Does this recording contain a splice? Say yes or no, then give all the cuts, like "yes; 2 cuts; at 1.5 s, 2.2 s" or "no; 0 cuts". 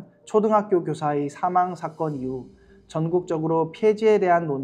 no; 0 cuts